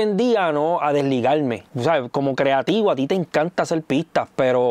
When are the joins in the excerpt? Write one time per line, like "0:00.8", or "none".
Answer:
0:01.6